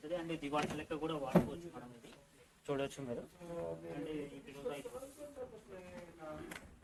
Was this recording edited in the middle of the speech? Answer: no; 0 cuts

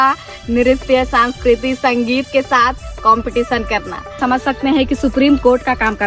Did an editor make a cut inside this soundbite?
yes; 1 cut; at 4.2 s

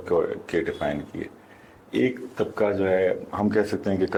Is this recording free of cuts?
yes; 0 cuts

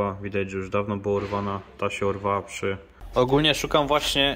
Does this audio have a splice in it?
yes; 1 cut; at 2.9 s

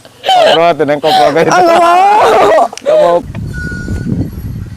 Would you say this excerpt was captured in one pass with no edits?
no; 1 cut; at 3.2 s

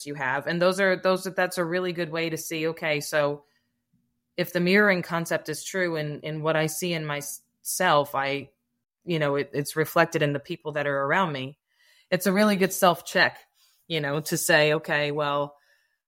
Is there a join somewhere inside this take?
no; 0 cuts

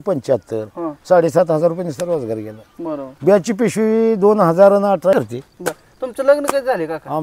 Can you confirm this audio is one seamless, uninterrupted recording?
no; 1 cut; at 5.1 s

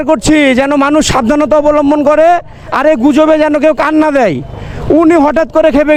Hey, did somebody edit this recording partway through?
no; 0 cuts

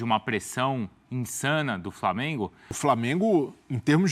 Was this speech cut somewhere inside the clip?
yes; 1 cut; at 2.7 s

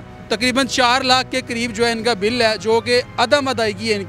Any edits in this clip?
no; 0 cuts

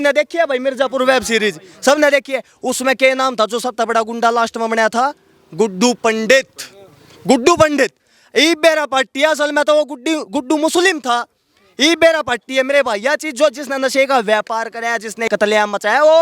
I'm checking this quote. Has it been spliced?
no; 0 cuts

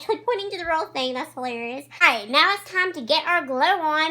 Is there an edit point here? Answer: yes; 1 cut; at 1.9 s

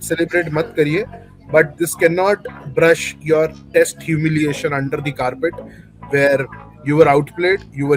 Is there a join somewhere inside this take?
no; 0 cuts

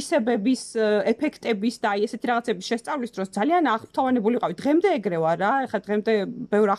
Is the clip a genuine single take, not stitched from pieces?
yes; 0 cuts

